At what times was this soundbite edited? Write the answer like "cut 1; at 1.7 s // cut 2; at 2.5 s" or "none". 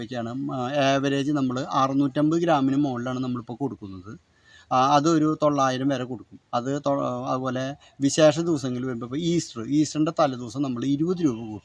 none